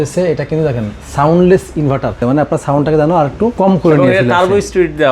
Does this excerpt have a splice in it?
yes; 2 cuts; at 2.2 s, 3.5 s

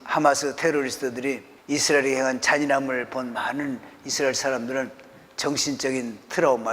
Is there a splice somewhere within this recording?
yes; 1 cut; at 1.5 s

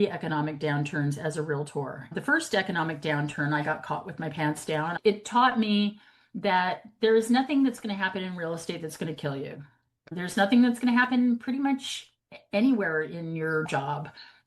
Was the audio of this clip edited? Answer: yes; 1 cut; at 4.9 s

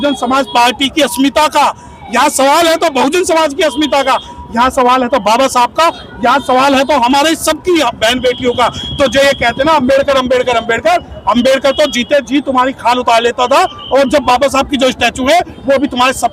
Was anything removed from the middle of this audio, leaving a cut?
no; 0 cuts

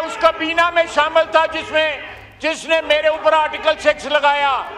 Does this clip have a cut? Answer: no; 0 cuts

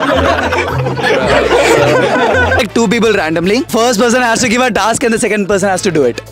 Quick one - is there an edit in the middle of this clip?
yes; 2 cuts; at 2.6 s, 3.7 s

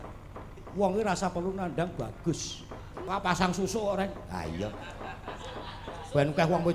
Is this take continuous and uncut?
no; 1 cut; at 3.0 s

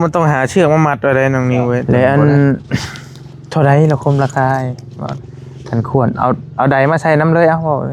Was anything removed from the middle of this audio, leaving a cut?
yes; 1 cut; at 1.8 s

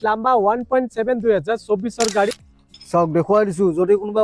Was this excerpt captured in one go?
no; 1 cut; at 2.4 s

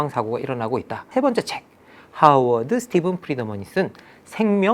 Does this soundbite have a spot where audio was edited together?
yes; 1 cut; at 1.0 s

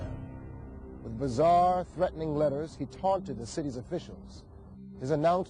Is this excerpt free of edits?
no; 1 cut; at 2.8 s

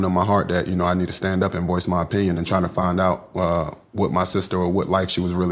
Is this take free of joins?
yes; 0 cuts

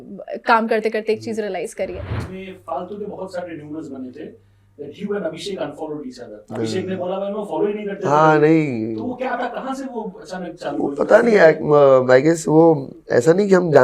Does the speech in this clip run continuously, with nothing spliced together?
no; 1 cut; at 2.2 s

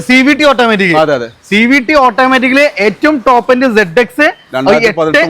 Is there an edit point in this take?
no; 0 cuts

